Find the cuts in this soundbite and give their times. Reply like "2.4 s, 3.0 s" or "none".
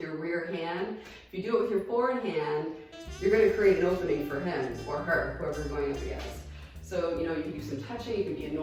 none